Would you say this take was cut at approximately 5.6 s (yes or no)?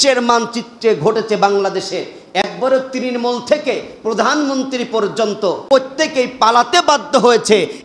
yes